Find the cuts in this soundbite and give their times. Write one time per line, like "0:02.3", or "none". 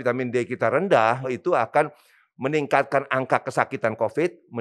0:01.3